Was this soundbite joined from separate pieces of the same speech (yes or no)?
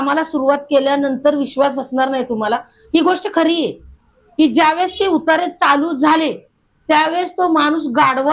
no